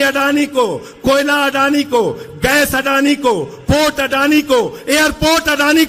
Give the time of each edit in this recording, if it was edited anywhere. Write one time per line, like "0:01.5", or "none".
none